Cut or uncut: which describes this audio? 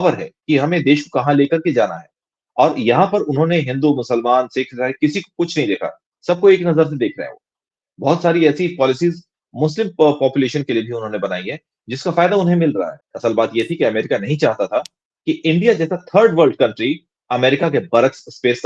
cut